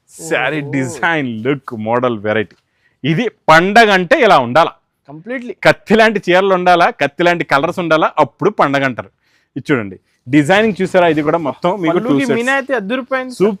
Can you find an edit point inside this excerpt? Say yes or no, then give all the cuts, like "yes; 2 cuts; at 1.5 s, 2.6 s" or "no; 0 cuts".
no; 0 cuts